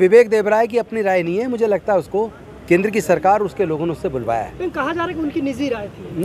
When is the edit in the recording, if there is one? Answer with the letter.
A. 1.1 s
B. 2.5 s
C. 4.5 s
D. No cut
B